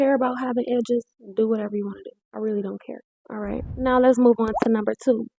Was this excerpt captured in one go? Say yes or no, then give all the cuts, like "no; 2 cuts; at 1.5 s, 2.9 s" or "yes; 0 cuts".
yes; 0 cuts